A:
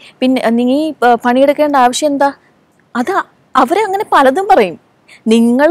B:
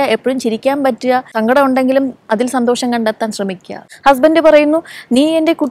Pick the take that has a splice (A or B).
B